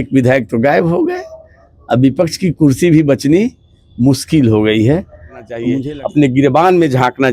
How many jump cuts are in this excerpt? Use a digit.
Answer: 1